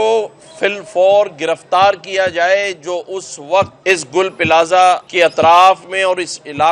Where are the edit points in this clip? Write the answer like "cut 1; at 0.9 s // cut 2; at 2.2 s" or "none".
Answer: cut 1; at 3.8 s // cut 2; at 5.1 s